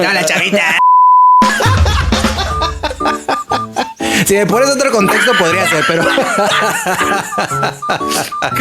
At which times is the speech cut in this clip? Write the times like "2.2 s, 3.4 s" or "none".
none